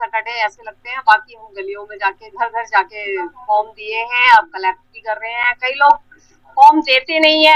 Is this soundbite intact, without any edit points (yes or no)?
yes